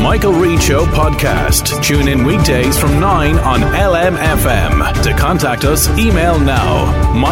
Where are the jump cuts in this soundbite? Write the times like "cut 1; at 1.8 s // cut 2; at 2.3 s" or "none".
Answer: none